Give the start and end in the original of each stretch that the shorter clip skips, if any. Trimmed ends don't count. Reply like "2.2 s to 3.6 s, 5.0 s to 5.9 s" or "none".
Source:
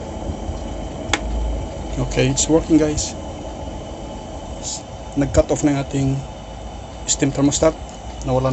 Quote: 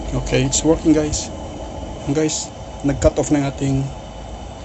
4.0 s to 4.5 s